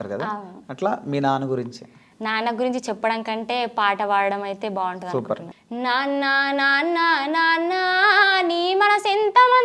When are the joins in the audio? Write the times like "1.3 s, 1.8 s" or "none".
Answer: 5.5 s